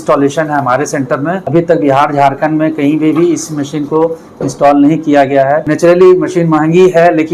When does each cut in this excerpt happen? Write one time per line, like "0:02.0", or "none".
0:01.5
0:05.7